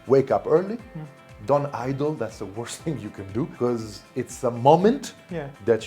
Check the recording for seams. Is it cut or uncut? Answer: cut